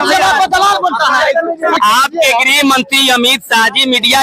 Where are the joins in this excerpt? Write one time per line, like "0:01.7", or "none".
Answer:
0:01.8